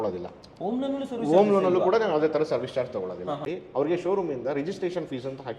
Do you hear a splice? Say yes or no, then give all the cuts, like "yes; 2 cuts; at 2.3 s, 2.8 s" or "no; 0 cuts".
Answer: yes; 1 cut; at 3.5 s